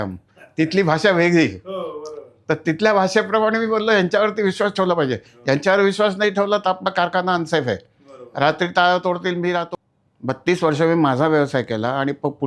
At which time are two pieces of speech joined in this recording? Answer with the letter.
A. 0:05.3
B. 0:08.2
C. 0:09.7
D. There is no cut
C